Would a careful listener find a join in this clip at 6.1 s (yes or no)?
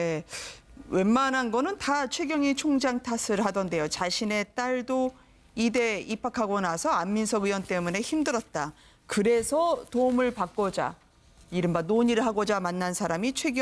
no